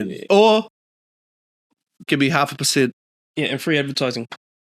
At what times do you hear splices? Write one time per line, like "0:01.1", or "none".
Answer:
0:03.2